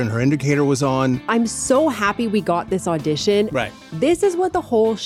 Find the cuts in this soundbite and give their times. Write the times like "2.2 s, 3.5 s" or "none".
1.2 s, 3.6 s